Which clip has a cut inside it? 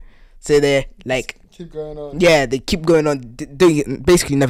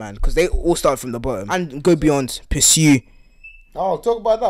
second; 1 cut; at 1.5 s

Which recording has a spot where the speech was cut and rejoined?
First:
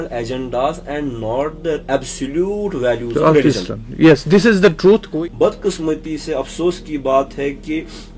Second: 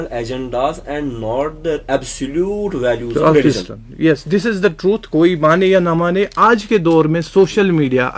first; 1 cut; at 5.1 s

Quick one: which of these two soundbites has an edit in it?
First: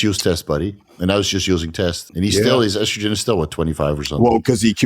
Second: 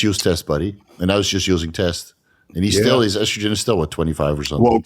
first; 1 cut; at 2.0 s

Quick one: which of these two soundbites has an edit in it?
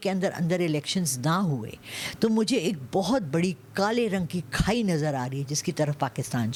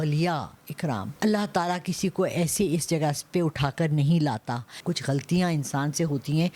second; 2 cuts; at 1.1 s, 4.8 s

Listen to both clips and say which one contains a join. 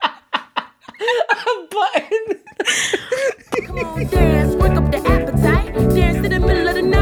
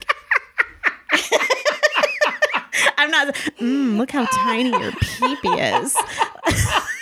first; 1 cut; at 4.0 s

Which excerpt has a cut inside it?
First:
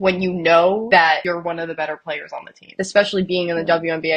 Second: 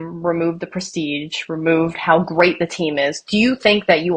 first; 2 cuts; at 1.0 s, 2.6 s

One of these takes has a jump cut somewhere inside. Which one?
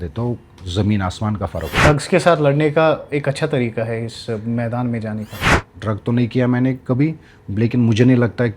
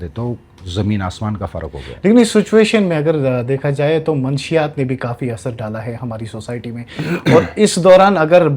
first; 2 cuts; at 1.8 s, 5.6 s

